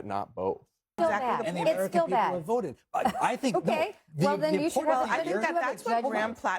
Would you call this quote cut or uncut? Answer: cut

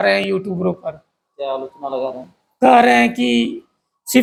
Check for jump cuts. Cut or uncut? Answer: uncut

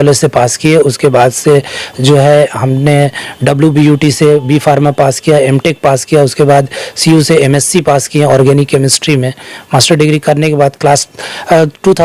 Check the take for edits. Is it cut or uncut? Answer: uncut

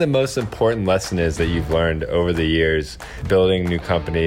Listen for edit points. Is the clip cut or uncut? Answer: cut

